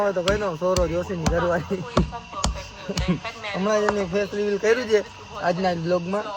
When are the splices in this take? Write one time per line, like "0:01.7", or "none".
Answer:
none